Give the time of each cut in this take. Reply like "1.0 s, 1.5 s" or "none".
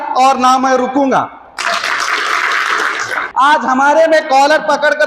3.2 s